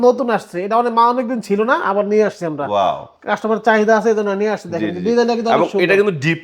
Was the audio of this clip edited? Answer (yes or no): no